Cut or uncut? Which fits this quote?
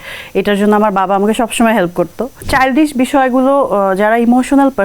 cut